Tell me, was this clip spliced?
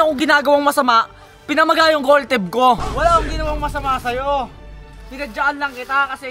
yes; 1 cut; at 2.9 s

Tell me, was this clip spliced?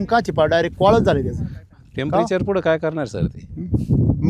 no; 0 cuts

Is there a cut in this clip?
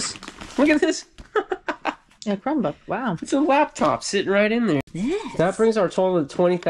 yes; 1 cut; at 4.8 s

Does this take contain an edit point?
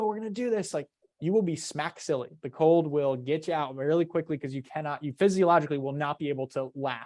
no; 0 cuts

